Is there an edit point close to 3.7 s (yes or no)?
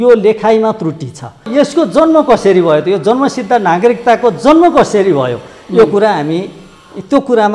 no